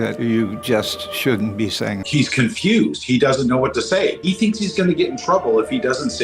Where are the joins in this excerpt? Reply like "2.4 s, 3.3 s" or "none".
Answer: 2.1 s, 4.2 s